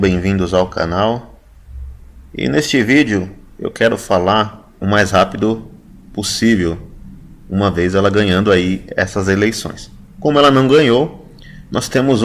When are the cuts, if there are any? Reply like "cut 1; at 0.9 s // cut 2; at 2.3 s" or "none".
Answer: none